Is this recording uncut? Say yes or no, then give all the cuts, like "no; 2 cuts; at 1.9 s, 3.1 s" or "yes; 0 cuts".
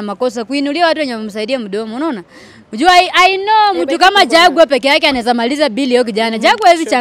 yes; 0 cuts